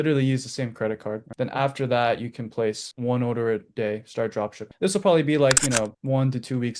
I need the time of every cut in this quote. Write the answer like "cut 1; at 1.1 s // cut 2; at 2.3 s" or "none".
cut 1; at 1.3 s

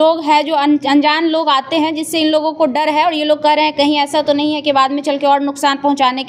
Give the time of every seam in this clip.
none

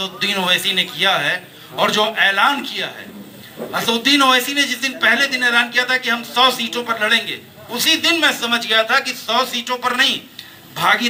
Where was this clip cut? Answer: none

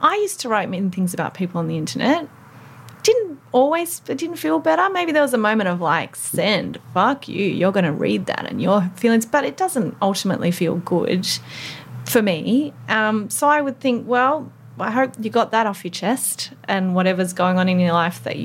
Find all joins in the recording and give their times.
none

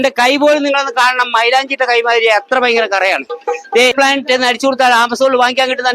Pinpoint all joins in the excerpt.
cut 1; at 3.9 s

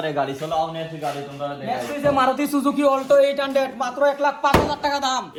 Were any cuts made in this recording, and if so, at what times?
none

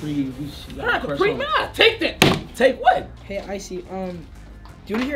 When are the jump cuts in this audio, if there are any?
cut 1; at 3.1 s

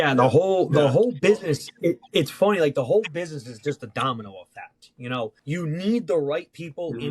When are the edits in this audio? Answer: cut 1; at 5.4 s

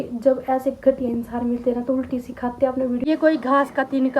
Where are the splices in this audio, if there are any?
cut 1; at 3.0 s

